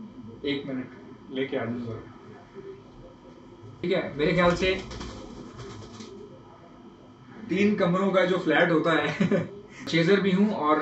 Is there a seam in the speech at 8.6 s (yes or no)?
no